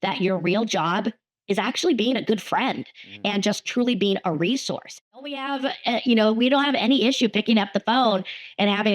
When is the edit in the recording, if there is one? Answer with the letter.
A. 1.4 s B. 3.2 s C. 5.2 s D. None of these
C